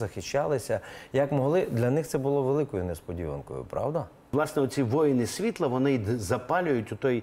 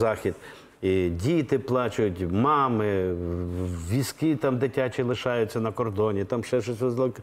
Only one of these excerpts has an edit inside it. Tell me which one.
first; 1 cut; at 4.3 s

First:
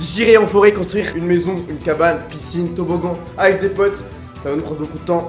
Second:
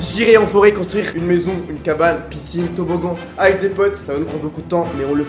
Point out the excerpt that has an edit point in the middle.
second; 1 cut; at 4.0 s

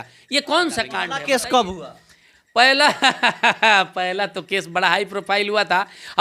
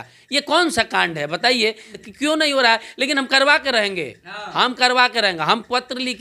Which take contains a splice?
first; 1 cut; at 1.1 s

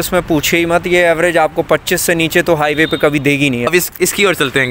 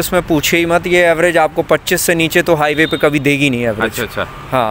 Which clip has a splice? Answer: first; 1 cut; at 3.7 s

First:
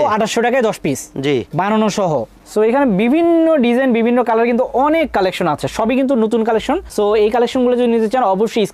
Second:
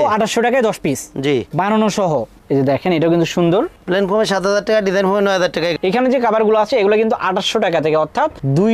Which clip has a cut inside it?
second; 2 cuts; at 2.4 s, 5.8 s

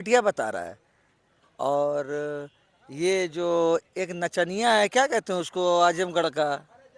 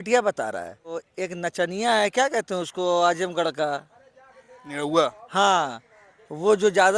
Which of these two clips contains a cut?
second; 1 cut; at 1.1 s

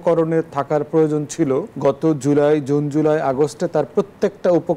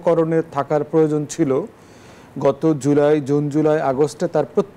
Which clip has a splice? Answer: first; 1 cut; at 1.7 s

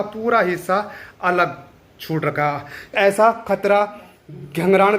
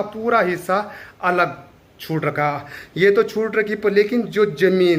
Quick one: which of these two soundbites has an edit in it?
first; 1 cut; at 2.9 s

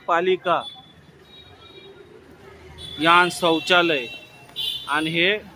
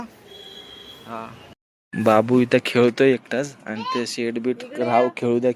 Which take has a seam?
second; 1 cut; at 1.6 s

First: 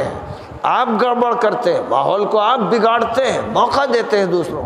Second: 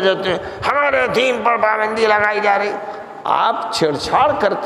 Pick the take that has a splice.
second; 1 cut; at 3.1 s

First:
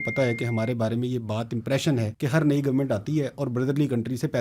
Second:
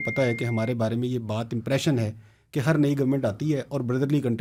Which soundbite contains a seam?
first; 1 cut; at 2.1 s

